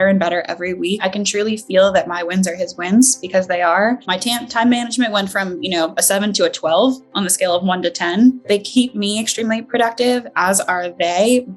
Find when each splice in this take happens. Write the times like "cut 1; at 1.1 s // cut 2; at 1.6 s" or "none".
cut 1; at 1.0 s // cut 2; at 4.1 s // cut 3; at 8.5 s